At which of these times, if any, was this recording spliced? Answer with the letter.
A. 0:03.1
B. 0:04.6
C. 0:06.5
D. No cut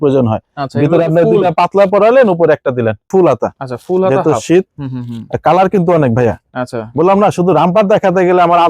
A